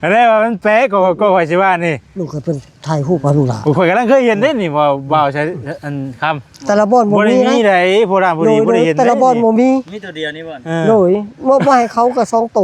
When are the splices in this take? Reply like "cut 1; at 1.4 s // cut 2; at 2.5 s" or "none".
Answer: none